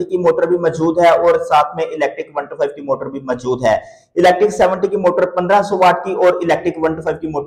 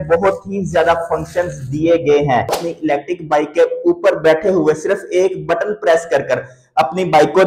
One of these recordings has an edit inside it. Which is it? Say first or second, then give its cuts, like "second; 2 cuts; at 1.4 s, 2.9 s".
second; 1 cut; at 2.6 s